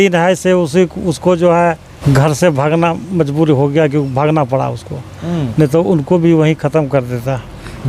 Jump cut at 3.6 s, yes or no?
no